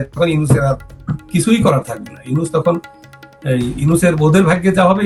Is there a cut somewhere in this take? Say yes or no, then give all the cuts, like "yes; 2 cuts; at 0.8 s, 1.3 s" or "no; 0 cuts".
no; 0 cuts